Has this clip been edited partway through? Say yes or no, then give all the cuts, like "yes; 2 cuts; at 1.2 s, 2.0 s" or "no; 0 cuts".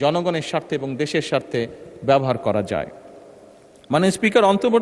no; 0 cuts